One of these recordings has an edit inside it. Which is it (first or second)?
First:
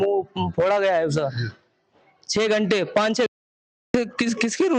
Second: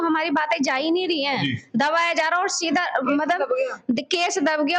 first